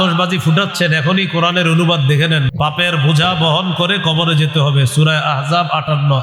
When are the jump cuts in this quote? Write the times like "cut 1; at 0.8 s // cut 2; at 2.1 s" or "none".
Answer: cut 1; at 2.5 s